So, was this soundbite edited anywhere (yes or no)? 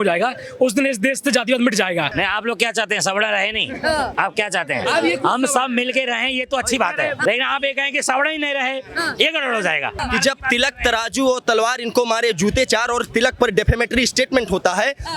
yes